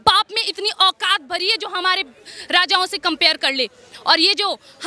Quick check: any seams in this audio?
no; 0 cuts

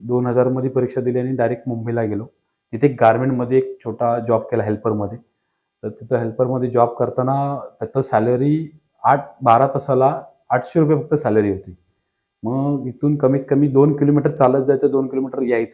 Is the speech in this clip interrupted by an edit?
no; 0 cuts

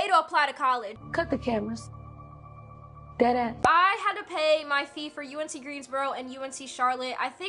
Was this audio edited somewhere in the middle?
no; 0 cuts

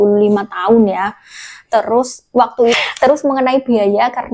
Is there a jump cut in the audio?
yes; 1 cut; at 2.8 s

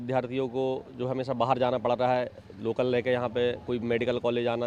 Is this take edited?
no; 0 cuts

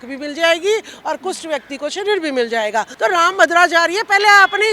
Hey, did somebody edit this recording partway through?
yes; 1 cut; at 2.9 s

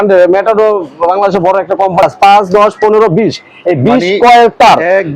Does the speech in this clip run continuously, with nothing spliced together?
no; 1 cut; at 2.0 s

